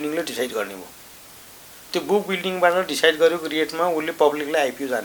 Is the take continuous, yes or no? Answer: yes